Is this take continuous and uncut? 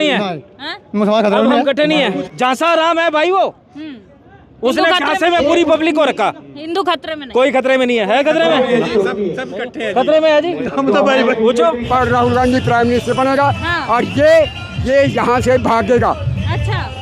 no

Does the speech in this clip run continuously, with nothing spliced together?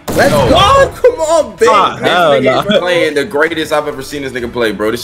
yes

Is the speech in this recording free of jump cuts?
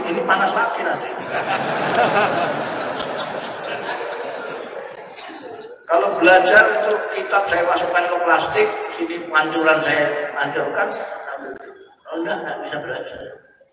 yes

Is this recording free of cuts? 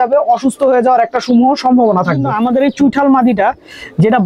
no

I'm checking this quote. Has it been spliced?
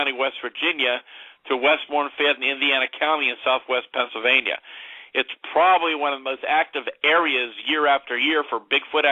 yes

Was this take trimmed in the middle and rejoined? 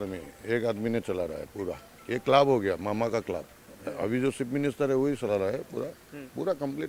yes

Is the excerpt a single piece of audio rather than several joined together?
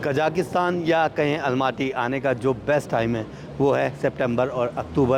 yes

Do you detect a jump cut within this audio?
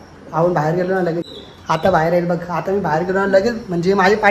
yes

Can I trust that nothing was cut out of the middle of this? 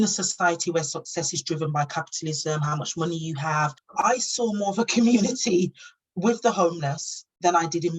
no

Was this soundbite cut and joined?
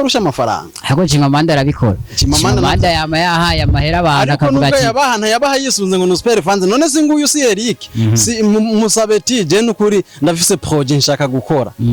no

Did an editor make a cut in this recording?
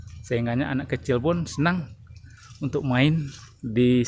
no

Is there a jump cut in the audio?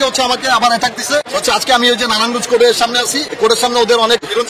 no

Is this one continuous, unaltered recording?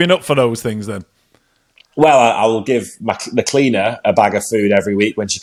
yes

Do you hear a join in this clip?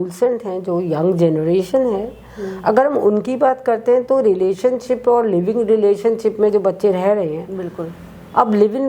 no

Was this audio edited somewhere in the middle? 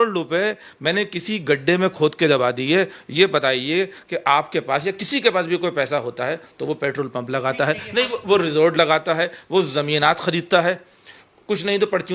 no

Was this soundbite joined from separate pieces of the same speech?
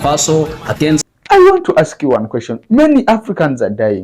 yes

